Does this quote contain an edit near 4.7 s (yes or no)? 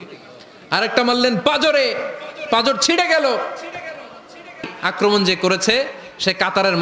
yes